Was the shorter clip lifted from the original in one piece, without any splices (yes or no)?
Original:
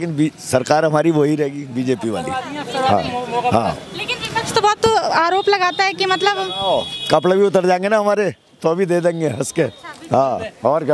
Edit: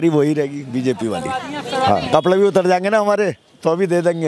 no